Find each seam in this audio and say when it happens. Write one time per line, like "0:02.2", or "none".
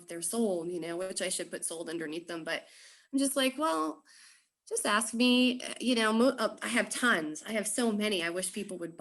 none